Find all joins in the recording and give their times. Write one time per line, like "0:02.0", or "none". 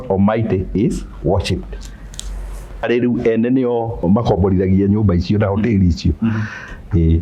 0:02.8
0:04.0